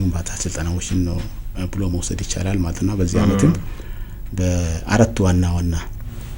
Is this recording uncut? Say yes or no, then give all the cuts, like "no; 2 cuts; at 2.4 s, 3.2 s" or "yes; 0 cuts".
yes; 0 cuts